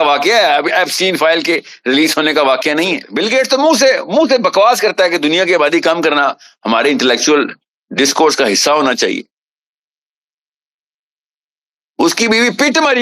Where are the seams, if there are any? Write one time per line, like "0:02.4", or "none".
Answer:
0:03.1